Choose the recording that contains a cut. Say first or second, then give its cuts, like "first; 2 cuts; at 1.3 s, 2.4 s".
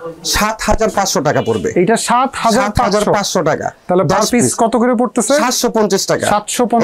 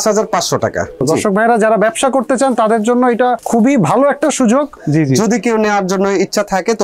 second; 3 cuts; at 0.9 s, 3.4 s, 4.8 s